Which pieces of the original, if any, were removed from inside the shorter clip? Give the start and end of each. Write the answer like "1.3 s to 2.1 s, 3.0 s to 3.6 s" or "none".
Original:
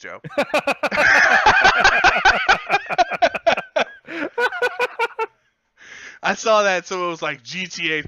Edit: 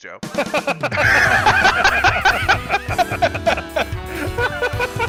none